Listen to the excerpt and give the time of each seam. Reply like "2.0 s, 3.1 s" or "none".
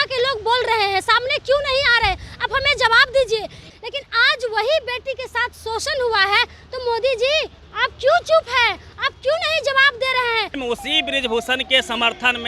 3.7 s, 10.5 s

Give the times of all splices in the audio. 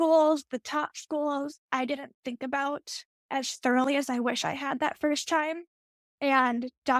1.6 s

